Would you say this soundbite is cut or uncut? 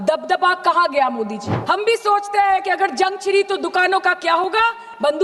cut